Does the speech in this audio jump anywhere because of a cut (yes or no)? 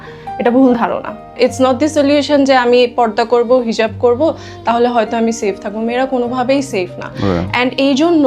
yes